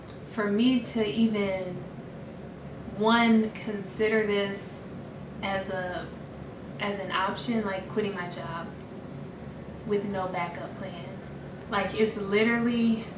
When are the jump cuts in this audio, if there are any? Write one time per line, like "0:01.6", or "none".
0:11.6

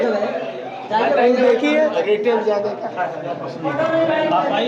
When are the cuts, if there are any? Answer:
none

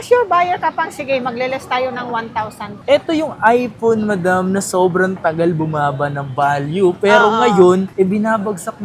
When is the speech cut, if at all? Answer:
0:02.7

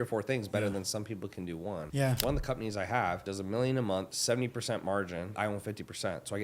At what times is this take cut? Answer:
0:02.1
0:03.3
0:04.1
0:05.3

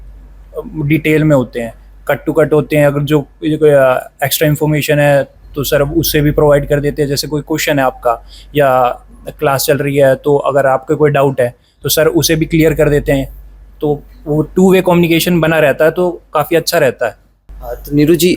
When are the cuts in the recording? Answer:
none

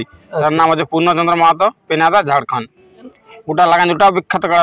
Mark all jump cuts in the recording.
0:03.2

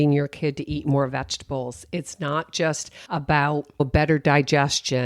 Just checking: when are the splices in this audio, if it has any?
0:02.9
0:03.8

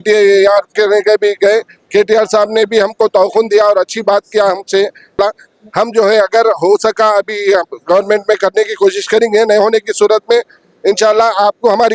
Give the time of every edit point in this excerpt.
0:05.2

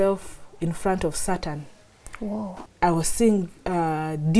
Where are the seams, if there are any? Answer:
0:02.5

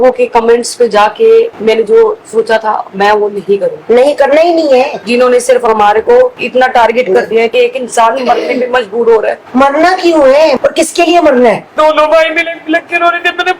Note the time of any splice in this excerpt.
0:05.0
0:07.5
0:10.6
0:11.7

